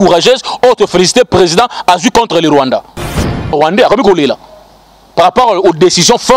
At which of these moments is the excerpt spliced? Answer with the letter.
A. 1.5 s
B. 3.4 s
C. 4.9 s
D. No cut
B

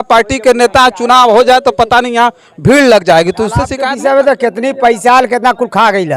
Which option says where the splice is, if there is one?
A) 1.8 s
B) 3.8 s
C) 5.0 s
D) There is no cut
B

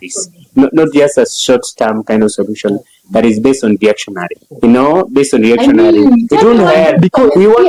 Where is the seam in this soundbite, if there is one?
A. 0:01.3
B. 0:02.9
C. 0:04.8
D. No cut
D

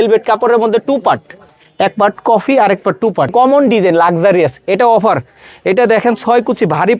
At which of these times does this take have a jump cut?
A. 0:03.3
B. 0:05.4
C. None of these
A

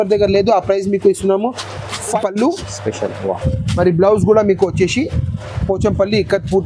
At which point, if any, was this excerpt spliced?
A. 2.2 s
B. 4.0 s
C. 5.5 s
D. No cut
A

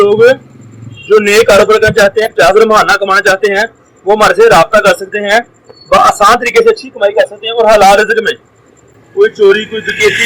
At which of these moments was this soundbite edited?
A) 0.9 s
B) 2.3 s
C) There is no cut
B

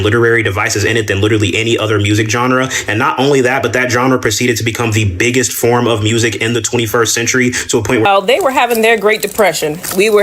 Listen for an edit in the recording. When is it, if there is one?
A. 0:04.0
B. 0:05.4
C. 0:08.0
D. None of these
C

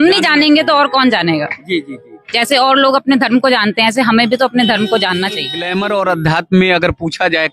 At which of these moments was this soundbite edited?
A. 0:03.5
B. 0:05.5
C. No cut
B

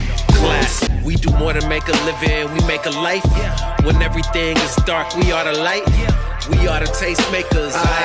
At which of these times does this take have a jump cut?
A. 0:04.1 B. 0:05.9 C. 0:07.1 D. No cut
D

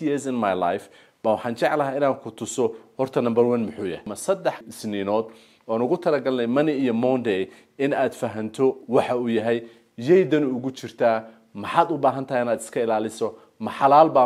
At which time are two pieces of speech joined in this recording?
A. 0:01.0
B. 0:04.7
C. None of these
B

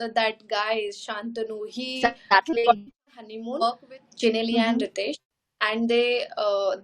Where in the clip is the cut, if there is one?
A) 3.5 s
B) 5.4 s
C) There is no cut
A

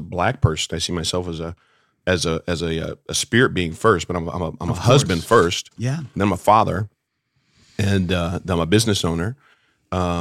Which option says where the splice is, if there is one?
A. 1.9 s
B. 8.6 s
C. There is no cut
C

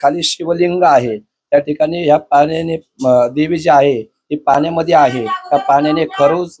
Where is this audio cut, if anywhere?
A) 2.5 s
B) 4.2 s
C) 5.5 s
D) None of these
D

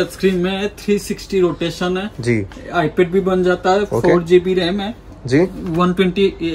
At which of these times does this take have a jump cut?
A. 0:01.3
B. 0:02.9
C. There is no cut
C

